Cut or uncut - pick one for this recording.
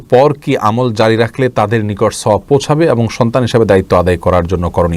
uncut